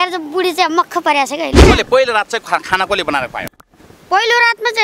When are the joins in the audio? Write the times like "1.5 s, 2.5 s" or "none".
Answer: 1.6 s